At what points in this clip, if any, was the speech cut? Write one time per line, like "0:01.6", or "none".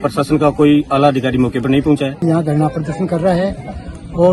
0:02.2